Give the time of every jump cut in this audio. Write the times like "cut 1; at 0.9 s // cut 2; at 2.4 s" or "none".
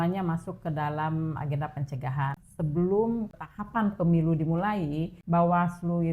cut 1; at 2.4 s // cut 2; at 3.4 s // cut 3; at 5.1 s